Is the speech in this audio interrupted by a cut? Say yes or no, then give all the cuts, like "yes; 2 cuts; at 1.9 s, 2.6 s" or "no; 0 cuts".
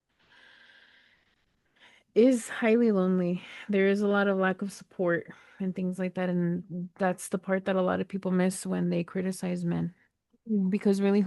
no; 0 cuts